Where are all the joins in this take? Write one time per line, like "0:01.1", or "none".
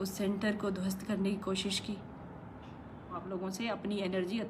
0:03.2